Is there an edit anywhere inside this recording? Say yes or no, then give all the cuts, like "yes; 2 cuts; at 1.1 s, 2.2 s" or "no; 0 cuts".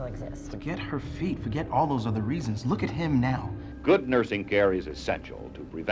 yes; 1 cut; at 3.6 s